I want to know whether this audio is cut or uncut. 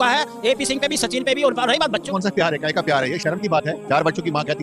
cut